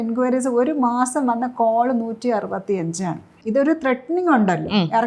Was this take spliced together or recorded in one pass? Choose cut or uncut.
cut